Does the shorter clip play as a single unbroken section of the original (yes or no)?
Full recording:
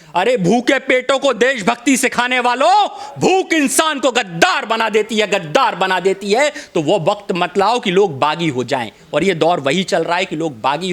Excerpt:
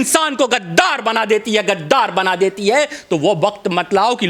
yes